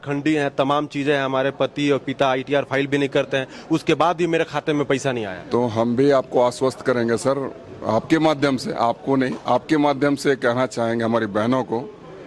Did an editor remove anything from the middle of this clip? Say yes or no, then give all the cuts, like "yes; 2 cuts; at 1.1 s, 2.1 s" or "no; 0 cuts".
no; 0 cuts